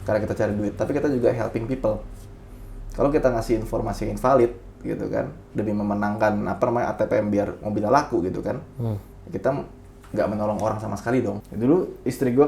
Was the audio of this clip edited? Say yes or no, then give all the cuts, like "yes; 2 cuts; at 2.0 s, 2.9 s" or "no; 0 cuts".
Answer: yes; 1 cut; at 11.5 s